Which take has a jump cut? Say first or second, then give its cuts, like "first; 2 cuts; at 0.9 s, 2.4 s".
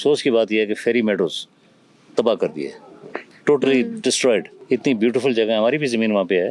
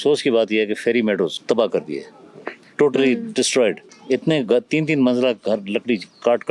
second; 2 cuts; at 1.4 s, 3.9 s